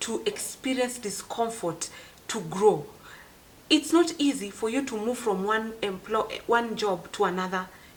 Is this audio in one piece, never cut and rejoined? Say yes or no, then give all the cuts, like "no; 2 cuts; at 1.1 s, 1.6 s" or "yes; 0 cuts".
yes; 0 cuts